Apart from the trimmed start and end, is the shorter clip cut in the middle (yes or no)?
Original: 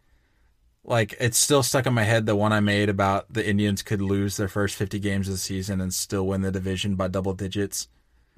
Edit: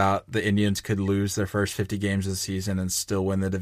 no